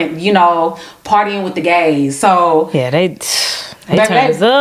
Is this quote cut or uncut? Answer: uncut